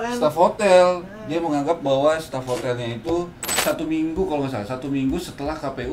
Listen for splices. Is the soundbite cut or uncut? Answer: cut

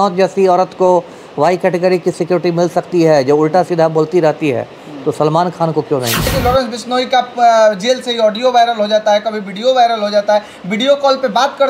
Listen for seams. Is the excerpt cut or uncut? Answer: cut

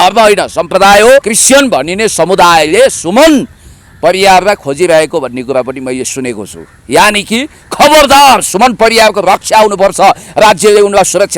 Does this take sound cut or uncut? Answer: cut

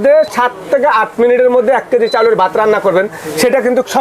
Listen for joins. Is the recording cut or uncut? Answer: uncut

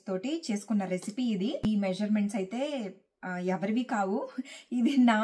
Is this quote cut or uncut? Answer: uncut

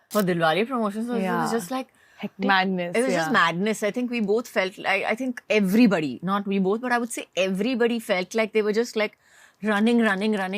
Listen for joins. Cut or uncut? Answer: uncut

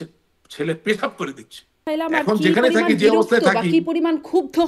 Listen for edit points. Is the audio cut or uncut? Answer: cut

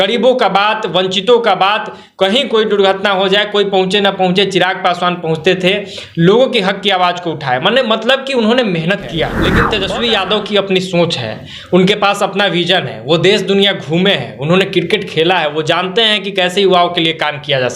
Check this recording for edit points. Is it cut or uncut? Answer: cut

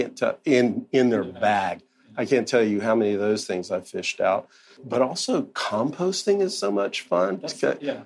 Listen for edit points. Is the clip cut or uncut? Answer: cut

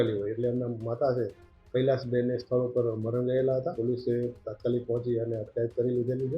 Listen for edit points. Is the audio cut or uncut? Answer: cut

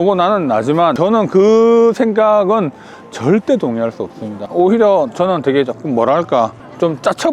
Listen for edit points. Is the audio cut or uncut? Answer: cut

